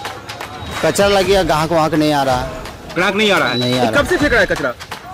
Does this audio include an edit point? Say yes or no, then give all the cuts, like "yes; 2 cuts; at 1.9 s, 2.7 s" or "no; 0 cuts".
no; 0 cuts